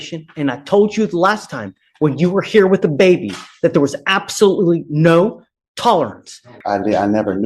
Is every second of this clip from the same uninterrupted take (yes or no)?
no